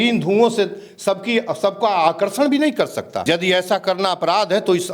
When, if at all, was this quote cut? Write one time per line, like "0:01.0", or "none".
0:03.1